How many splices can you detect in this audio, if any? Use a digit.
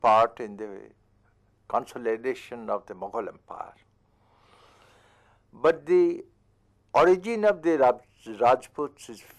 1